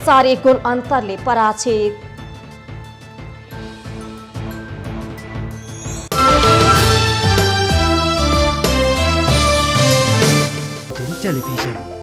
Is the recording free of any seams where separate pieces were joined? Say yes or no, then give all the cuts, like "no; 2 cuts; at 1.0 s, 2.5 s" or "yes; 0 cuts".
no; 1 cut; at 10.9 s